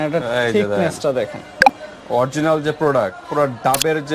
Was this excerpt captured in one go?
yes; 0 cuts

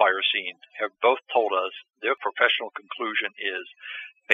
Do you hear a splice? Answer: yes; 1 cut; at 2.2 s

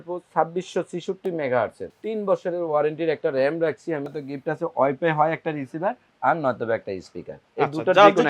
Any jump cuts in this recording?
yes; 2 cuts; at 1.8 s, 4.1 s

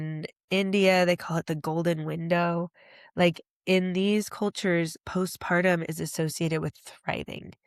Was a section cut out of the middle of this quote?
no; 0 cuts

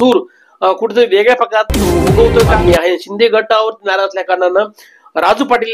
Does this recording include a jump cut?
yes; 1 cut; at 2.5 s

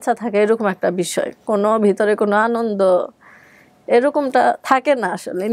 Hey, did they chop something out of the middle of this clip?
no; 0 cuts

